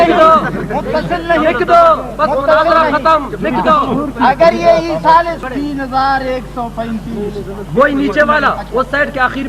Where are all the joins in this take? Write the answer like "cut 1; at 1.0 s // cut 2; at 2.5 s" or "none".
cut 1; at 5.4 s